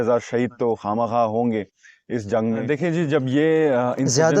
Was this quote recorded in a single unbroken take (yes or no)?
no